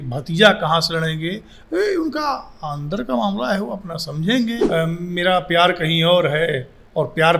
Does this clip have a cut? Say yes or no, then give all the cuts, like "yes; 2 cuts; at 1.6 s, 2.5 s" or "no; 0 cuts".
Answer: yes; 1 cut; at 4.6 s